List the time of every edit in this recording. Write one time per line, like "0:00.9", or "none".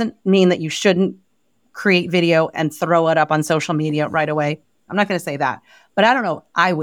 0:04.8